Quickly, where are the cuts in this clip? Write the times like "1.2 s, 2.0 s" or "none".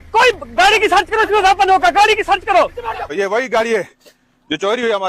3.1 s